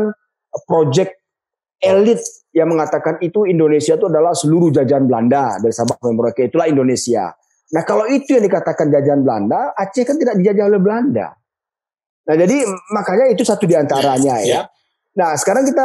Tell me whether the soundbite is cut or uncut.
uncut